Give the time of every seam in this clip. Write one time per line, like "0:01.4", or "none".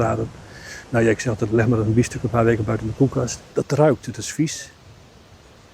0:03.4